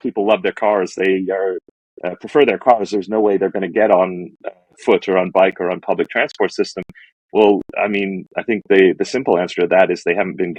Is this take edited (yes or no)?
no